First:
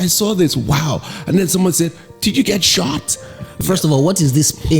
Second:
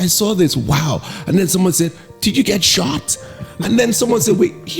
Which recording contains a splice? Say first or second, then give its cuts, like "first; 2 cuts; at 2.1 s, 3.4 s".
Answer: first; 1 cut; at 3.6 s